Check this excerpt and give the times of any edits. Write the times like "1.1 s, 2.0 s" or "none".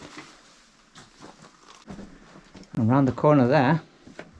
1.8 s